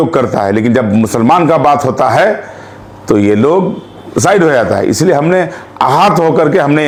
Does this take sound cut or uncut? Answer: uncut